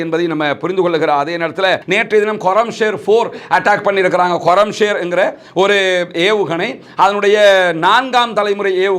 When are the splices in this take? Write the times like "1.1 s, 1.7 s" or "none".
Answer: 1.8 s